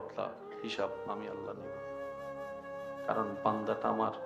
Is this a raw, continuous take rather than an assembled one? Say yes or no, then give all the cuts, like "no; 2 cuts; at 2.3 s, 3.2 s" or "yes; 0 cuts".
no; 2 cuts; at 1.2 s, 3.1 s